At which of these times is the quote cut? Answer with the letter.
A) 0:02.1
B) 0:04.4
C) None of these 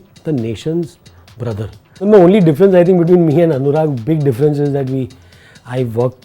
A